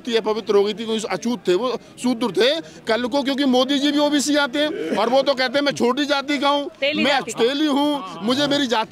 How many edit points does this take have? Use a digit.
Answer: 0